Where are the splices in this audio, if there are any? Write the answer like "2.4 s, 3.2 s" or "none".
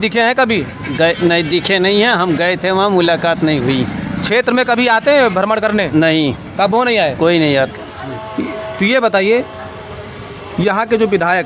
7.7 s